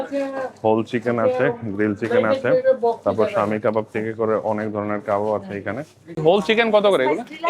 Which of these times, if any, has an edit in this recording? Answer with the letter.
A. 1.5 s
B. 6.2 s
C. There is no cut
B